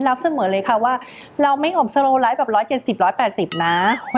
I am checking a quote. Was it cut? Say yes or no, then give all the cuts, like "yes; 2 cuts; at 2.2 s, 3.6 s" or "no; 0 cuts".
no; 0 cuts